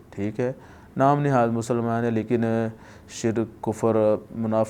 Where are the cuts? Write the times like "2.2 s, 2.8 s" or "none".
none